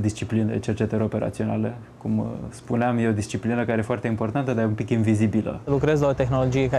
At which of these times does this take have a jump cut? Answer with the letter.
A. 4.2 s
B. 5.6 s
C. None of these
B